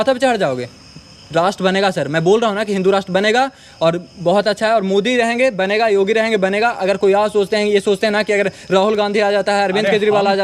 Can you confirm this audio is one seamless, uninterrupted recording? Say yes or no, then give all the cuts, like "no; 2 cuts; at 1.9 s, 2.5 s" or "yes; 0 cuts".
yes; 0 cuts